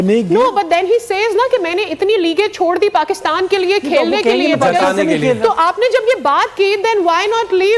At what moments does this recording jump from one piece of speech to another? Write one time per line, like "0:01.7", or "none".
none